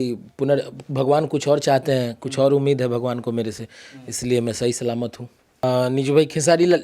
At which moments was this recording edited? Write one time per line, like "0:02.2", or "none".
0:05.6